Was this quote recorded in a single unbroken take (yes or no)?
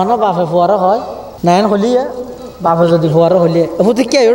no